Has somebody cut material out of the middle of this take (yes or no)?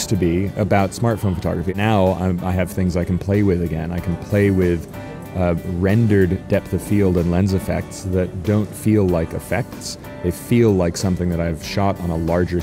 yes